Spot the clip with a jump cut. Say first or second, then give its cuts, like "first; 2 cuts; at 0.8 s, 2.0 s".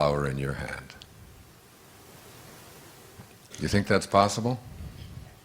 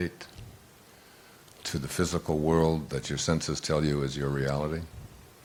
first; 1 cut; at 3.4 s